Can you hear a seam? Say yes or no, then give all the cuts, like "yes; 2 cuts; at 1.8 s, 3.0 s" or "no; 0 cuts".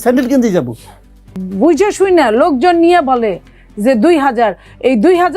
yes; 1 cut; at 1.4 s